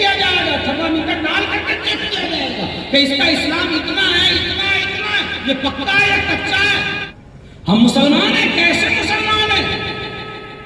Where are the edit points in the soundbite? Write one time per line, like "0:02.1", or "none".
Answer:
0:07.1